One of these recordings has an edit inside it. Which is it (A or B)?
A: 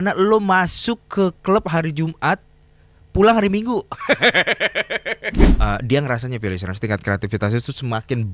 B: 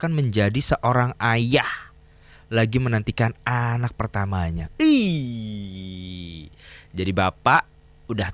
A